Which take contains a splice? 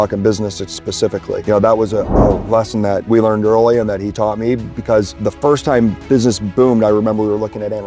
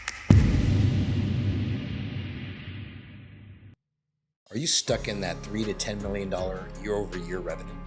first; 3 cuts; at 1.4 s, 3.0 s, 5.1 s

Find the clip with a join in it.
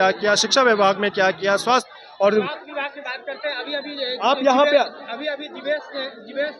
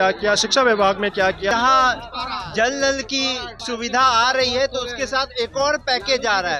second; 2 cuts; at 1.5 s, 3.5 s

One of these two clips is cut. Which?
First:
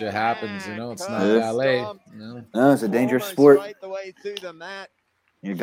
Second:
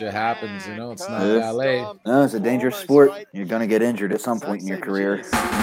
second; 2 cuts; at 1.9 s, 3.3 s

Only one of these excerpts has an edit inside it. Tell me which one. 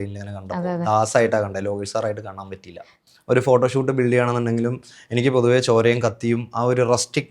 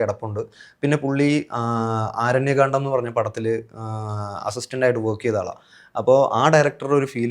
first; 1 cut; at 3.1 s

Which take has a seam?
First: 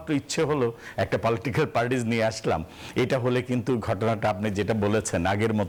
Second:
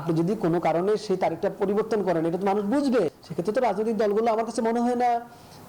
second; 1 cut; at 3.2 s

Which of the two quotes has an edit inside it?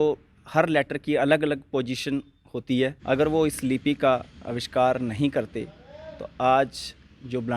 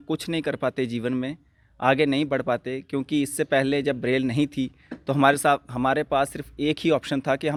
first; 1 cut; at 3.0 s

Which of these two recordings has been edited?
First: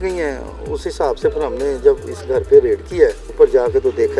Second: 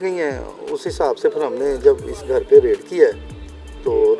first; 1 cut; at 3.2 s

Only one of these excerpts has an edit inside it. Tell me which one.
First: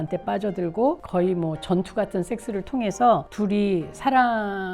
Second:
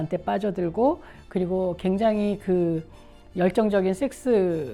first; 2 cuts; at 1.0 s, 3.3 s

